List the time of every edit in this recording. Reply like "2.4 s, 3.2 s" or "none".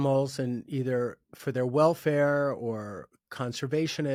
none

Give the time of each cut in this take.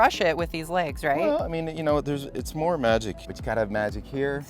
3.3 s

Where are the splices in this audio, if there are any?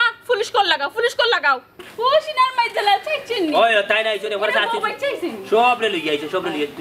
1.7 s

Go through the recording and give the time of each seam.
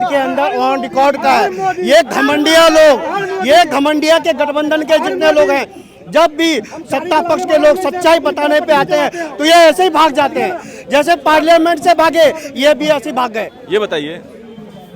13.6 s

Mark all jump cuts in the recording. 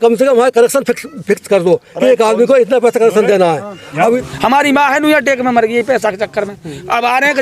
4.3 s

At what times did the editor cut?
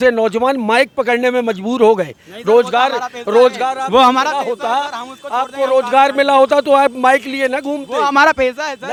none

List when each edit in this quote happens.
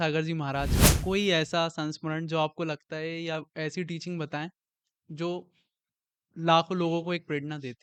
none

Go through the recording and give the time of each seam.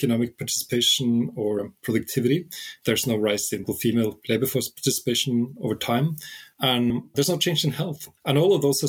1.6 s, 3.6 s

